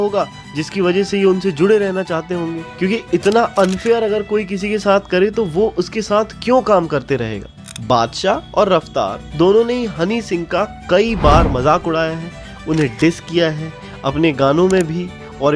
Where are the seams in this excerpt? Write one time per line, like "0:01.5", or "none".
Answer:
0:07.5